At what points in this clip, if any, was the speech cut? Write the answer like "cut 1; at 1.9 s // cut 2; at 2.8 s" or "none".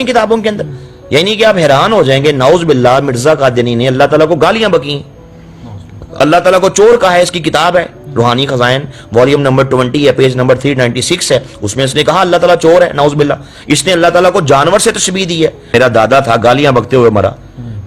cut 1; at 15.7 s